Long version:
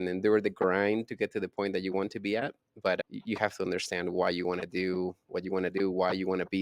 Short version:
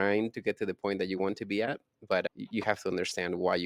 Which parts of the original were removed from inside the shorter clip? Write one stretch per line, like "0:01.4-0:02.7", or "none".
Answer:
none